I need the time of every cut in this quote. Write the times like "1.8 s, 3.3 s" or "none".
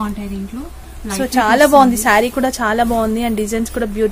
none